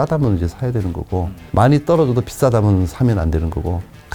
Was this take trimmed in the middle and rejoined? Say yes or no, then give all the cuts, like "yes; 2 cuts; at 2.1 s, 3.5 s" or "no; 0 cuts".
no; 0 cuts